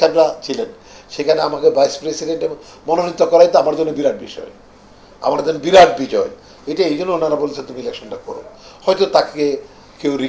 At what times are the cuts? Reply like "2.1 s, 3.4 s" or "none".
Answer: none